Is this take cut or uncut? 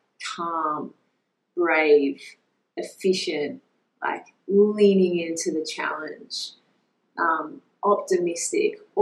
uncut